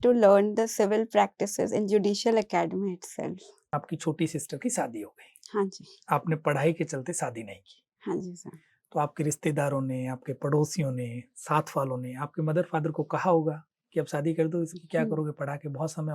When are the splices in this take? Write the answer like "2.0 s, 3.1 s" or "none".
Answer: 3.5 s